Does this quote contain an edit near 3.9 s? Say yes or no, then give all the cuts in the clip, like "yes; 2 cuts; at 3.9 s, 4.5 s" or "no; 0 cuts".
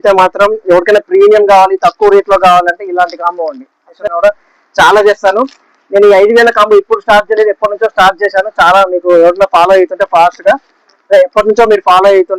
yes; 1 cut; at 3.9 s